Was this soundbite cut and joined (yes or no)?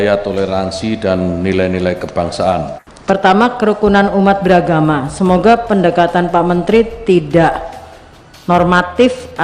yes